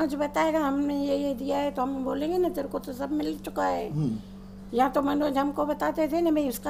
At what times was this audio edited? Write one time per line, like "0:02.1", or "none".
none

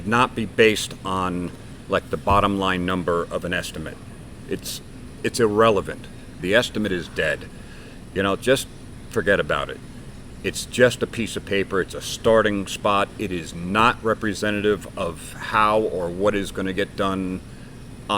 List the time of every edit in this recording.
0:06.4

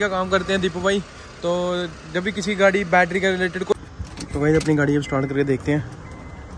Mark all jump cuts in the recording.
0:03.7

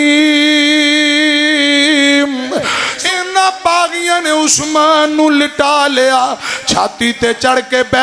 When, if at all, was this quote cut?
0:02.8

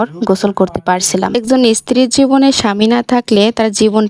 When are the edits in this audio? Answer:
0:01.3

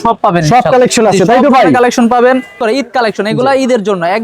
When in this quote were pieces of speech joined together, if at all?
0:02.6

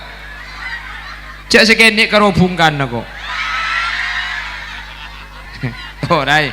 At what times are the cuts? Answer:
0:05.5

